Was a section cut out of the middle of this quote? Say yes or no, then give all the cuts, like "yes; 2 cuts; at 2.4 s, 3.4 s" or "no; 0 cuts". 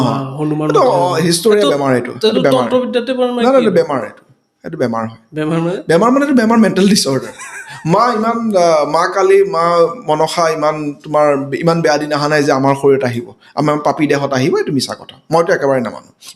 no; 0 cuts